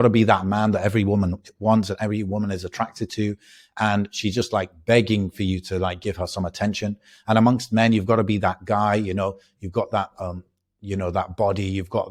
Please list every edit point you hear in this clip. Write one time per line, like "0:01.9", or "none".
none